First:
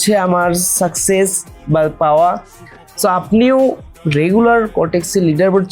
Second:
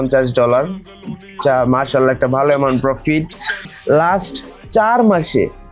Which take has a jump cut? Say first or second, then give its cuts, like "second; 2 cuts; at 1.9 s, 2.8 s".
second; 1 cut; at 3.8 s